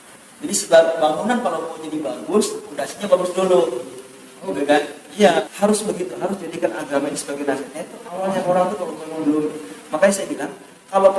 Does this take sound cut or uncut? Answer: cut